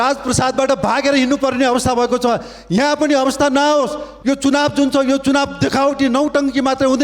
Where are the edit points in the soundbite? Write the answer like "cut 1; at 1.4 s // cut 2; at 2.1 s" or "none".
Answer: cut 1; at 4.1 s

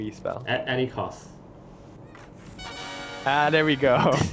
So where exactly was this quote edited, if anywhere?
cut 1; at 2.0 s

